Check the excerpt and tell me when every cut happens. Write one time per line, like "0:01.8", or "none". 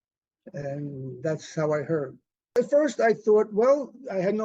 0:02.6